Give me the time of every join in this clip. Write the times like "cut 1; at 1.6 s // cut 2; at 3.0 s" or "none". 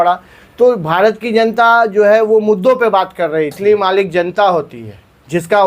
cut 1; at 3.5 s